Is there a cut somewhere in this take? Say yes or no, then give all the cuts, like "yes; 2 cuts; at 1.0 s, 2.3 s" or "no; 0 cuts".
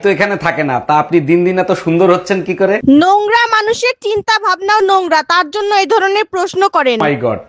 no; 0 cuts